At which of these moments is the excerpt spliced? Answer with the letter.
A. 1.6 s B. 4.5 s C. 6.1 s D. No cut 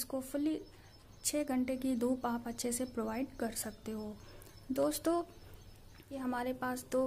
C